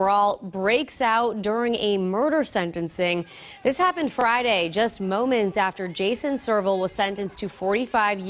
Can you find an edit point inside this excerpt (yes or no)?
no